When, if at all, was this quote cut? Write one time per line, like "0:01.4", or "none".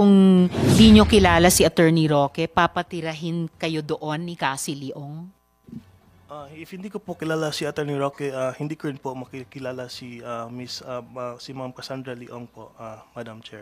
none